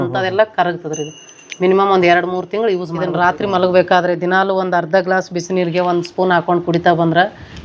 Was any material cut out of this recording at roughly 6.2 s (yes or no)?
no